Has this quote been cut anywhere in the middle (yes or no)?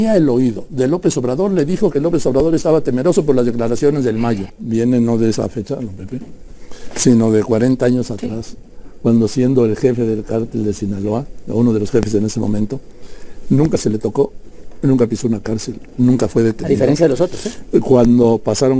yes